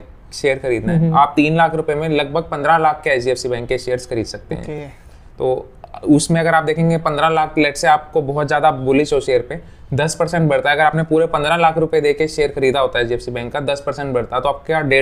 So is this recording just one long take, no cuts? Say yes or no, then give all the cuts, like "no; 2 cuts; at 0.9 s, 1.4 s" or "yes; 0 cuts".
yes; 0 cuts